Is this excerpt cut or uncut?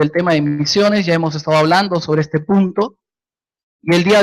cut